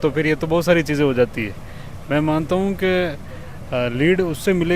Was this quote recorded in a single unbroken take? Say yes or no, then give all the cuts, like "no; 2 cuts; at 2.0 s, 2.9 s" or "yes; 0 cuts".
yes; 0 cuts